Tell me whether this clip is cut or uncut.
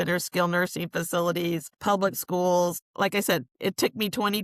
cut